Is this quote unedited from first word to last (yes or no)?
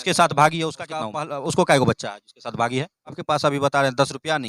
no